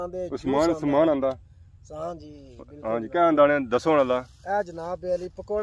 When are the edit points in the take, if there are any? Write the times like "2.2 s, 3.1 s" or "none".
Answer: none